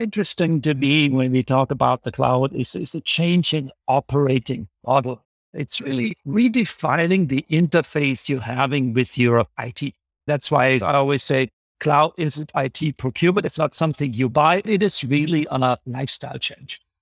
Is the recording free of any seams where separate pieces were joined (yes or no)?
no